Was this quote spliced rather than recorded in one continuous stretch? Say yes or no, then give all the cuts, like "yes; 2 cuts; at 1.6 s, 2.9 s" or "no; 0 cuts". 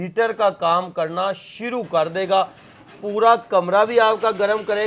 no; 0 cuts